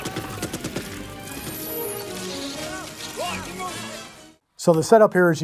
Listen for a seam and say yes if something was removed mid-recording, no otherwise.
no